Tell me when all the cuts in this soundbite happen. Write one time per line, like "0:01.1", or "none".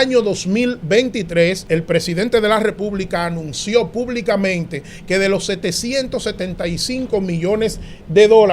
0:01.6